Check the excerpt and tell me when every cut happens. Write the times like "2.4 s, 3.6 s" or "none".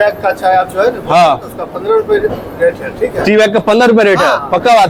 none